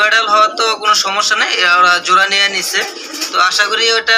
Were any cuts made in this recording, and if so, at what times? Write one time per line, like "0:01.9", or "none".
none